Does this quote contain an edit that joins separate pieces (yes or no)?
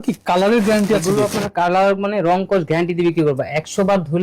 no